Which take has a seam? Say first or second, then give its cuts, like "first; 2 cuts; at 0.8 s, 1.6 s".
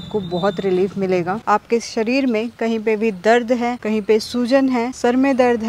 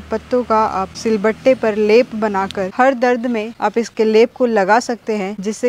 first; 1 cut; at 1.4 s